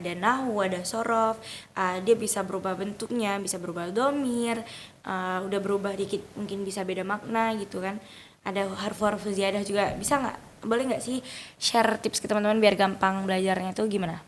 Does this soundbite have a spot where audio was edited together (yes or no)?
no